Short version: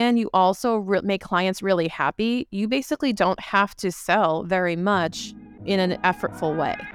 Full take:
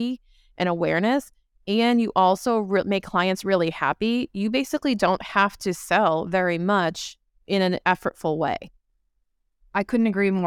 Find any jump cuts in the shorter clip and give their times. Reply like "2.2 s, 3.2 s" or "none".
none